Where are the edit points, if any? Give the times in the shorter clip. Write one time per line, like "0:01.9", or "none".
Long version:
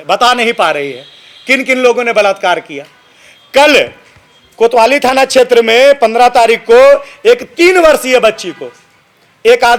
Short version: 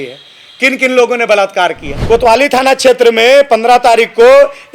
0:01.9